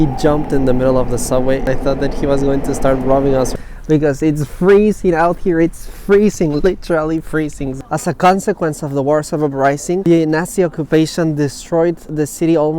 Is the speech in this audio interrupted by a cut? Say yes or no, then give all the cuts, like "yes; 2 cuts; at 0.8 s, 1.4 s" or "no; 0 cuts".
yes; 4 cuts; at 1.6 s, 3.5 s, 7.7 s, 10.0 s